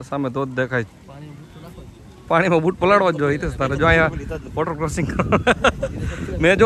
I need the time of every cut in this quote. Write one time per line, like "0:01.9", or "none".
none